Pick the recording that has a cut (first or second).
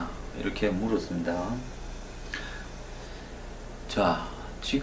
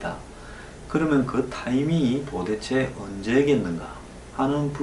second